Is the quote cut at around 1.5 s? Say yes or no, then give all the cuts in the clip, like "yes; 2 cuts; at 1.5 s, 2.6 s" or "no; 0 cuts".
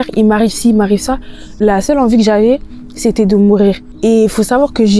yes; 2 cuts; at 1.5 s, 3.9 s